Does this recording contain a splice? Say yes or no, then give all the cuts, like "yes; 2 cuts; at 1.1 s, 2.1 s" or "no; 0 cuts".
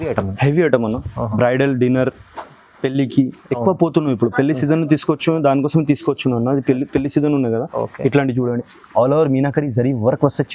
no; 0 cuts